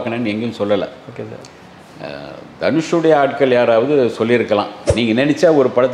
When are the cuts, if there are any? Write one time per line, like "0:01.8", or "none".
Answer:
0:04.8

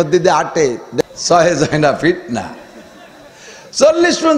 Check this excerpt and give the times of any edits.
0:01.0

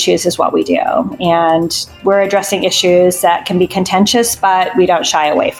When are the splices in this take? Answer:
none

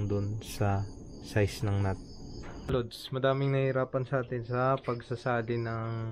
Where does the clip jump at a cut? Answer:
0:02.7

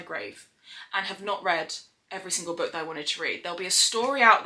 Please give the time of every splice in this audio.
none

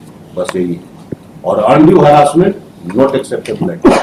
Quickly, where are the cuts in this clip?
none

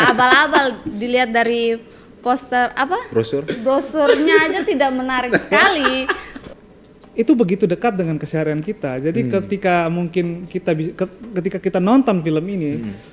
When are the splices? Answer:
0:06.4

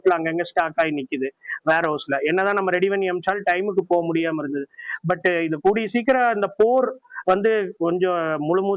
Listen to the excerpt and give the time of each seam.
0:04.8

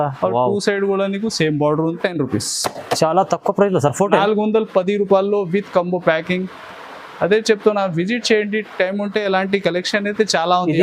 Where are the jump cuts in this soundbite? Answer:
0:02.0

